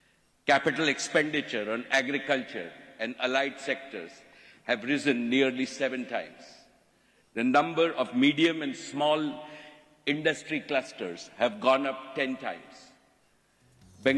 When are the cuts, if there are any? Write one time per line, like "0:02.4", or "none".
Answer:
none